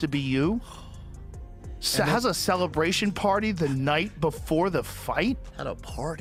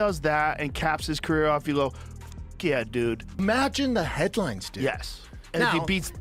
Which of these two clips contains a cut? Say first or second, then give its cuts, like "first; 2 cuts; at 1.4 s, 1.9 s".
second; 1 cut; at 3.2 s